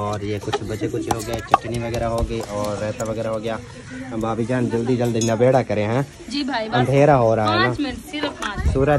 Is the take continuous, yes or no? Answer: yes